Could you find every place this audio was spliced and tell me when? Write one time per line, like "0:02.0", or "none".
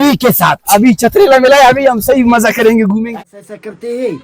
0:03.0